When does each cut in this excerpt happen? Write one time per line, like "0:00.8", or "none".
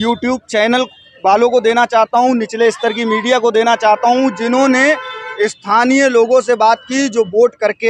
none